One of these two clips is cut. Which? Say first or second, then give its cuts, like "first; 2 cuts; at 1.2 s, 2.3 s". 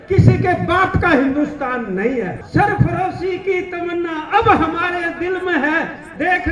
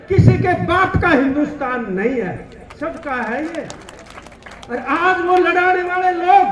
first; 1 cut; at 2.4 s